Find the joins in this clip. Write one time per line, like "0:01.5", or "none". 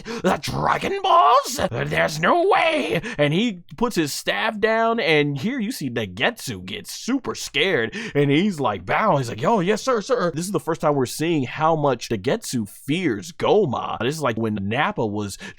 0:01.8
0:10.4
0:12.1
0:14.4